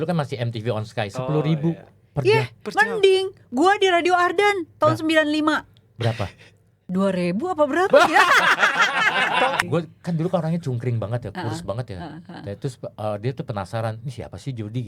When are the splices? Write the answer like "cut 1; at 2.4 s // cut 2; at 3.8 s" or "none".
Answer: cut 1; at 9.6 s